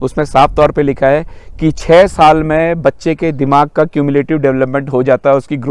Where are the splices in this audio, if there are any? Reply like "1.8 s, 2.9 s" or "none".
none